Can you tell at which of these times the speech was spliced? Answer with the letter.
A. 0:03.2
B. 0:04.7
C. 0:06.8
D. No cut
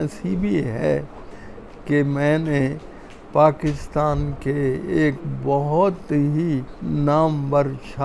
C